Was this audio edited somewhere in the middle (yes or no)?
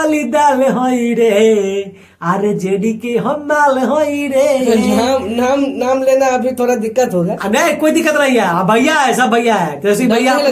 no